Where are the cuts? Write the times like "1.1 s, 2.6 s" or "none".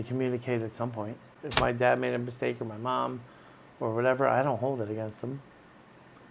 1.3 s